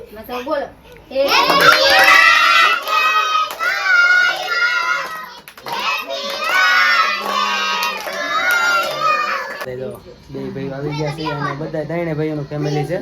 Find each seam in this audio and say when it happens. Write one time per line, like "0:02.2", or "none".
0:09.6